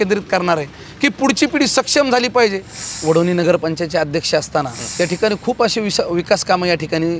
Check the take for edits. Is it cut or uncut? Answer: cut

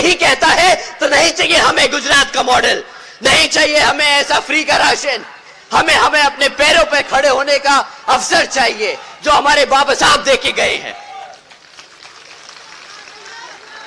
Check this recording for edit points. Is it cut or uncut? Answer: uncut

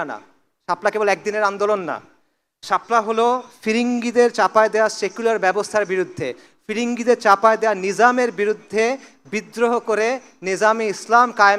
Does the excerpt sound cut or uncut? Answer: uncut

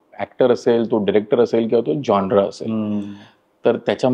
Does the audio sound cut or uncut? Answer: uncut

